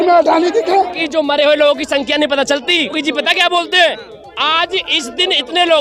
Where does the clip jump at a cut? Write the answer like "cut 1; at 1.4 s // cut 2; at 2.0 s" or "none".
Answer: cut 1; at 1.0 s // cut 2; at 3.0 s